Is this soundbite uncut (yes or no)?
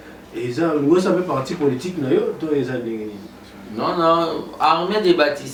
yes